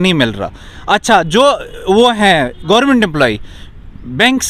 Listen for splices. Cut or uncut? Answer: uncut